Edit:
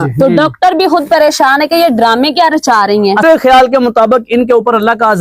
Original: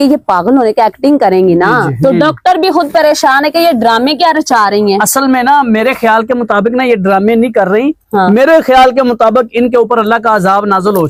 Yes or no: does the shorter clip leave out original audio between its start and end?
yes